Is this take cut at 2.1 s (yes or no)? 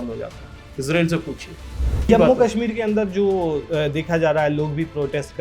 yes